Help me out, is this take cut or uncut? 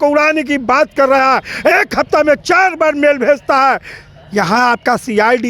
uncut